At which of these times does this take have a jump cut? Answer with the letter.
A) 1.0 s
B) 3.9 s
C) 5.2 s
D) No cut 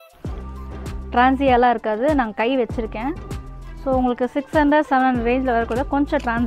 A